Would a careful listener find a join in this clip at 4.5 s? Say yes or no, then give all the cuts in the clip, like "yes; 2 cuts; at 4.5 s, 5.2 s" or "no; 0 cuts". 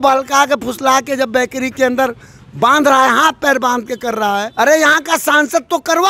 yes; 1 cut; at 4.5 s